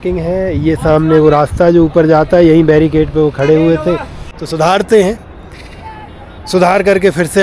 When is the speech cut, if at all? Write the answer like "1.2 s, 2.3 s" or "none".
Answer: none